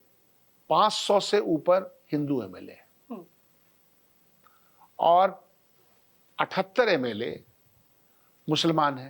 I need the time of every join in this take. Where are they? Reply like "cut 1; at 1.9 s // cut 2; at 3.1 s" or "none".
none